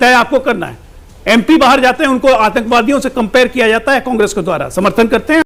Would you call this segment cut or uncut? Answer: uncut